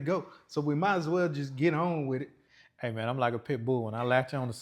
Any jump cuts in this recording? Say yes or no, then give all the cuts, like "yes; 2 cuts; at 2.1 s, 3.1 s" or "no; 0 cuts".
yes; 1 cut; at 2.7 s